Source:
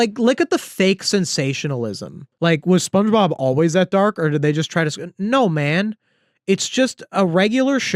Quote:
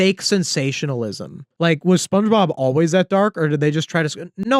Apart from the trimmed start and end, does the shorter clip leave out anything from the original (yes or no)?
no